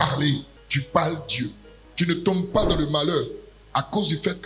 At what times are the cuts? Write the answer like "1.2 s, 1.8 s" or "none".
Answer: 1.7 s